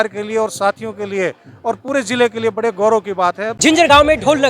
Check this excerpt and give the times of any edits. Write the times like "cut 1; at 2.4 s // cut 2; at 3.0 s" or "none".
cut 1; at 3.5 s